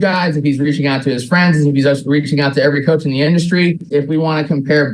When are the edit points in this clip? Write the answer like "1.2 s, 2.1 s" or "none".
3.8 s